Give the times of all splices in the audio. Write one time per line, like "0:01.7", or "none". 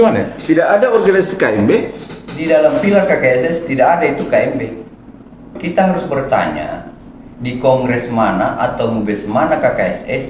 0:05.6